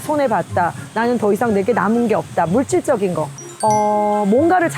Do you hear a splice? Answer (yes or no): yes